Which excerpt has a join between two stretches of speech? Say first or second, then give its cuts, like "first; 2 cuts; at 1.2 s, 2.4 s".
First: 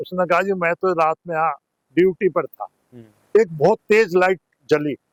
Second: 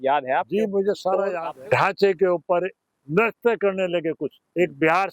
second; 1 cut; at 1.4 s